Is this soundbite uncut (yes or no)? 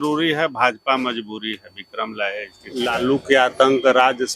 no